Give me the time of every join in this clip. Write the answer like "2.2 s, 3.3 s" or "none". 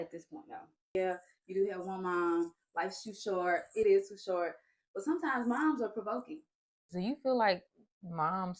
0.9 s, 6.8 s